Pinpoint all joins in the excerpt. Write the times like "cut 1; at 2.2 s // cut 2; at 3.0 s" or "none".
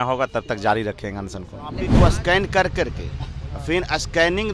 cut 1; at 1.9 s